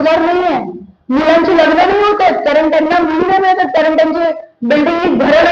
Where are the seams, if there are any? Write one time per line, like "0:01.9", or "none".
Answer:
none